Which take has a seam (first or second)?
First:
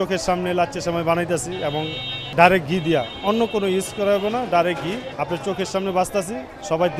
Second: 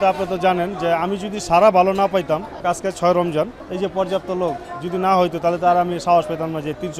second